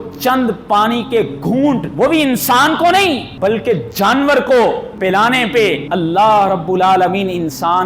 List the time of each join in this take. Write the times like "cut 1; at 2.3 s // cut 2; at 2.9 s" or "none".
cut 1; at 1.9 s // cut 2; at 3.3 s // cut 3; at 4.9 s // cut 4; at 5.8 s